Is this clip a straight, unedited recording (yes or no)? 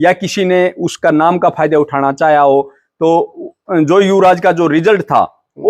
yes